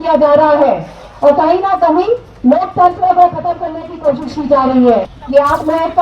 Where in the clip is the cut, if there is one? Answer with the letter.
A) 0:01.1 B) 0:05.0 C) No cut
B